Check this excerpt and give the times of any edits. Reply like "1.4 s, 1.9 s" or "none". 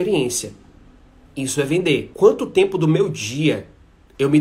2.1 s